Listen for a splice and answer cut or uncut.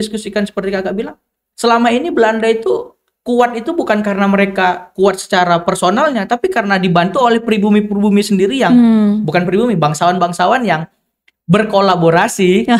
uncut